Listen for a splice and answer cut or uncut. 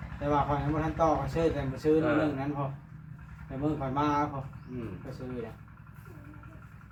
uncut